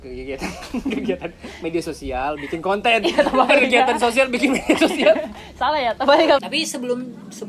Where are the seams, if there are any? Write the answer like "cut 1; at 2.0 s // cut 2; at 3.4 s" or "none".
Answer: cut 1; at 6.4 s